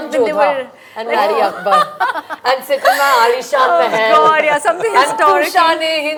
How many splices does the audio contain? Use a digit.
0